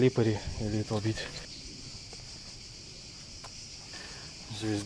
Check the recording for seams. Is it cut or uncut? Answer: cut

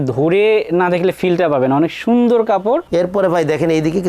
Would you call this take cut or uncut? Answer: cut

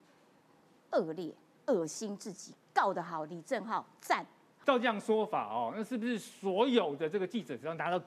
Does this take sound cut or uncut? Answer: cut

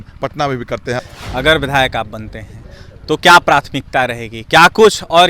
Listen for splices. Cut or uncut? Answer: cut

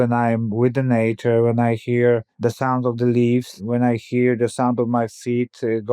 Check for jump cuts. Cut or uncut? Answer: cut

